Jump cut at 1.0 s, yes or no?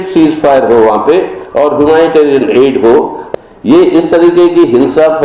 no